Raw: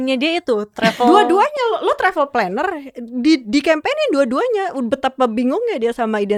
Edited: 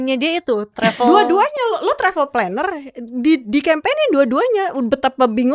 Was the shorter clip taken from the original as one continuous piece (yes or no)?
yes